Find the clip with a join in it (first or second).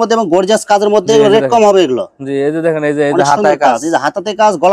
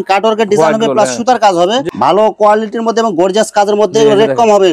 second